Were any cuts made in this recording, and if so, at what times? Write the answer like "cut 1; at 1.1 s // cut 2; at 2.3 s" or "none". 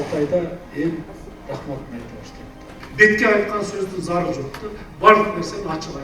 cut 1; at 2.8 s